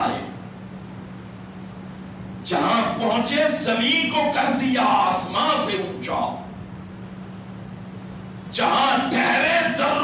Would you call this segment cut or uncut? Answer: uncut